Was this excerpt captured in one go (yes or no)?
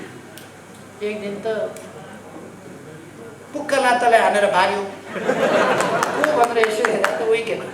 yes